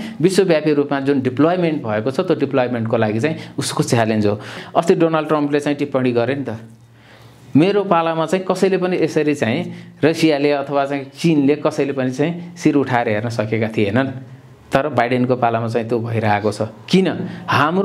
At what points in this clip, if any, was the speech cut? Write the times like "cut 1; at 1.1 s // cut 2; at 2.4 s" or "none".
cut 1; at 4.6 s